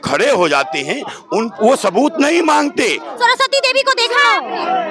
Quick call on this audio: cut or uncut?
cut